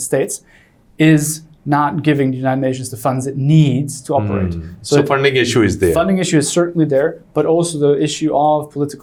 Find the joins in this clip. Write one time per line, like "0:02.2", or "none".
none